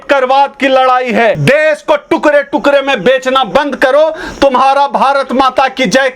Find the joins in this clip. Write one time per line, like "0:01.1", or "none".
0:01.4